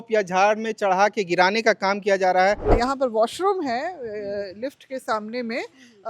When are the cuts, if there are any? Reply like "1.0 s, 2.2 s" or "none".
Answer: 2.7 s